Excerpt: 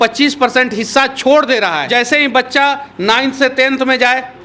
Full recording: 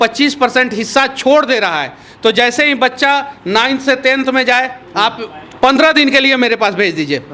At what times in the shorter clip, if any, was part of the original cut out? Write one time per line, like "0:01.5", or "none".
0:01.9